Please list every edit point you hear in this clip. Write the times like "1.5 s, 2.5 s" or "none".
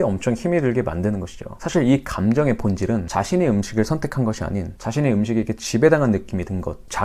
3.1 s